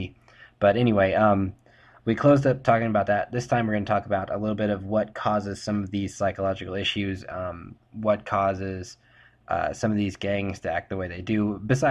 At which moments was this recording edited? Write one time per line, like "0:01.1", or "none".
0:07.8